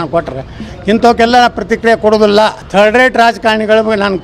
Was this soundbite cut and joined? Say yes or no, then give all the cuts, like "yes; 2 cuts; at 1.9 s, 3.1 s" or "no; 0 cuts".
yes; 1 cut; at 2.6 s